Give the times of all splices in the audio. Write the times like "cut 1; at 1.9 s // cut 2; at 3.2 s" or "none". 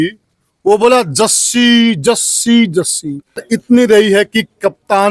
cut 1; at 3.4 s